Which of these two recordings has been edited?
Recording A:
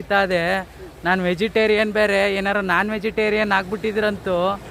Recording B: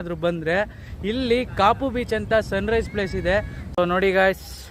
B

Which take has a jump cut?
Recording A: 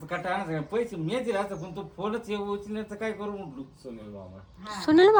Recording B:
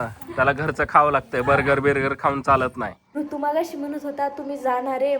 B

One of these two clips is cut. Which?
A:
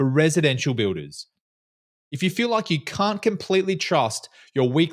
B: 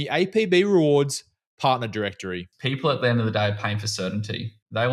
B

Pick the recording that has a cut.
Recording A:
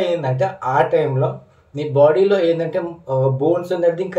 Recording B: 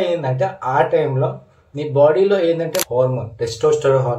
B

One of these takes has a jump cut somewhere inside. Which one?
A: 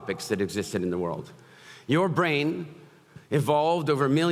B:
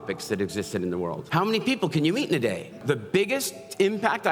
B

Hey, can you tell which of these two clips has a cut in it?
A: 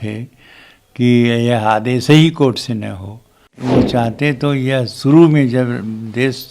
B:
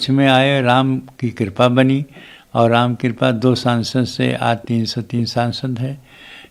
A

